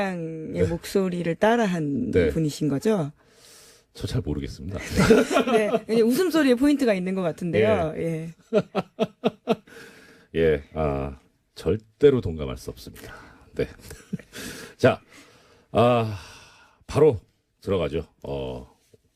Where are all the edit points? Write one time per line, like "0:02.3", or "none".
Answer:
0:05.8